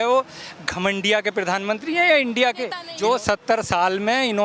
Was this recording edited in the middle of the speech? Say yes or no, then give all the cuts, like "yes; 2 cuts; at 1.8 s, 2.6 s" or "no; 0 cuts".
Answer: yes; 1 cut; at 2.8 s